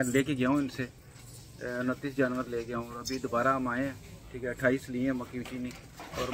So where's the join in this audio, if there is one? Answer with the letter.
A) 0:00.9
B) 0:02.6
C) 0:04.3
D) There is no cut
D